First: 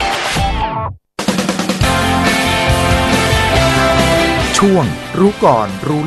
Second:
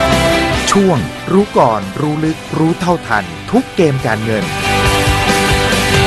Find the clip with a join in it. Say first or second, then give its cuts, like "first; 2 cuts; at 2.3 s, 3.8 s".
first; 1 cut; at 1.0 s